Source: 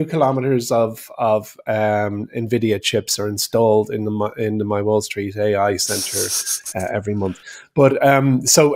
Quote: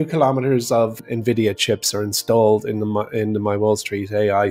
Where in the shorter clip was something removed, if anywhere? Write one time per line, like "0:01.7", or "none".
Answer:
0:01.0

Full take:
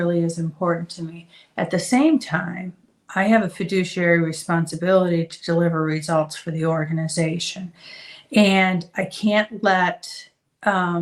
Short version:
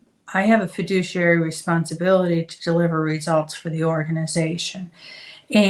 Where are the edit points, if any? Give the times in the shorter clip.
none

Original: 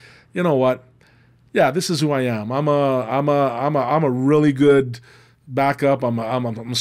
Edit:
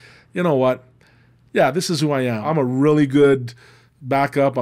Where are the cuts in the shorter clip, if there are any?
0:02.4

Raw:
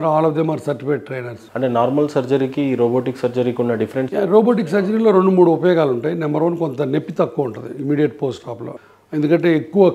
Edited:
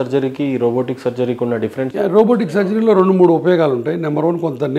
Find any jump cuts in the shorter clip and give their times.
none

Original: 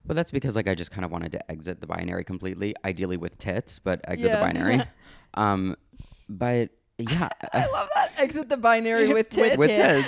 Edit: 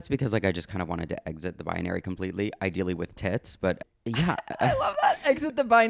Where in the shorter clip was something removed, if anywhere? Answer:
0:03.8

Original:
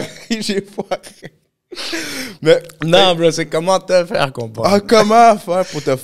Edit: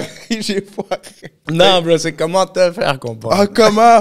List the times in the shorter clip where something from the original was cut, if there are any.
0:01.4

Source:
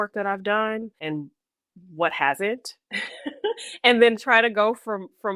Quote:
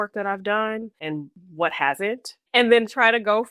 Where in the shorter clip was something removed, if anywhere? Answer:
0:01.4
0:02.4

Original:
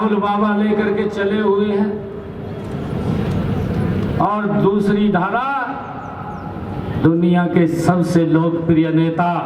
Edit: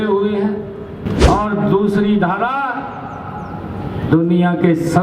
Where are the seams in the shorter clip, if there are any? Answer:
0:01.1

